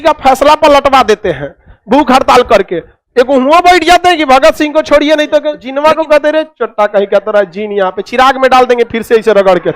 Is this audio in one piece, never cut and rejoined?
no; 1 cut; at 5.6 s

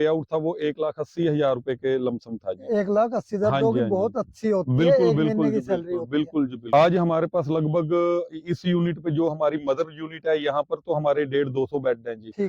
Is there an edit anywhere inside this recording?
yes; 1 cut; at 6.6 s

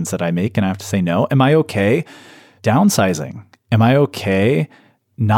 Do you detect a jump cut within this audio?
no; 0 cuts

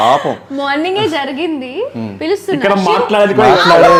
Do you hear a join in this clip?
no; 0 cuts

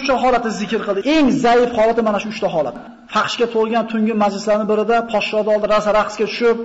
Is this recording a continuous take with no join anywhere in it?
no; 2 cuts; at 0.9 s, 2.9 s

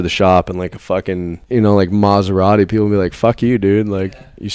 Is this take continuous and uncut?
no; 1 cut; at 1.4 s

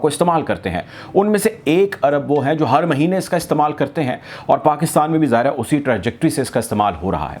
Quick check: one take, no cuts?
yes; 0 cuts

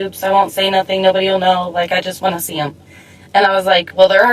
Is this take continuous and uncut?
yes; 0 cuts

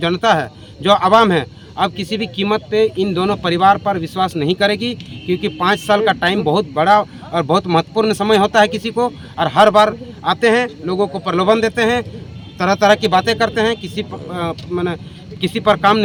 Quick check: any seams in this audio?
no; 0 cuts

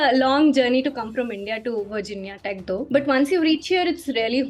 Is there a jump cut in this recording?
yes; 1 cut; at 2.9 s

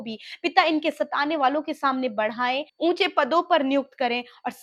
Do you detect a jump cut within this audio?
no; 0 cuts

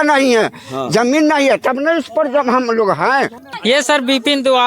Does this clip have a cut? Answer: yes; 1 cut; at 3.4 s

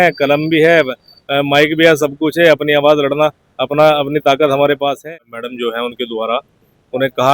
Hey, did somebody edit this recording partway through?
yes; 1 cut; at 5.0 s

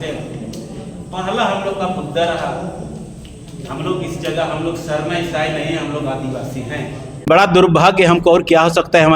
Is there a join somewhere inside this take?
yes; 1 cut; at 7.1 s

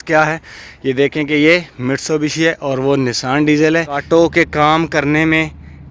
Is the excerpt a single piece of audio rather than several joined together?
no; 1 cut; at 4.0 s

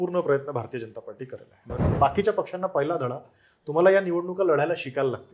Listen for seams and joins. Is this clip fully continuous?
no; 1 cut; at 1.8 s

